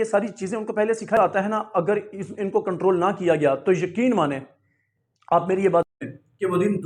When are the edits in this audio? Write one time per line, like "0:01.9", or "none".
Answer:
0:01.2